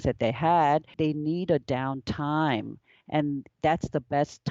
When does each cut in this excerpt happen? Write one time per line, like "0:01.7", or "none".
0:00.9